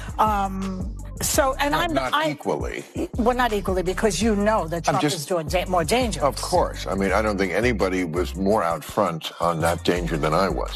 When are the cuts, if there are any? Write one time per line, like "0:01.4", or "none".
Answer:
none